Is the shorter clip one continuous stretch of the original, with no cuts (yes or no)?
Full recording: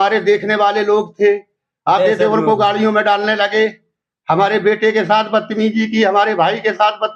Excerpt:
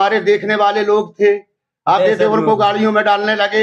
yes